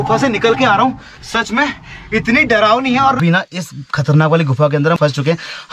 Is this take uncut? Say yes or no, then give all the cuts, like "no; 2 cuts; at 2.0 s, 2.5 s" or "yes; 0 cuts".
no; 2 cuts; at 3.2 s, 5.0 s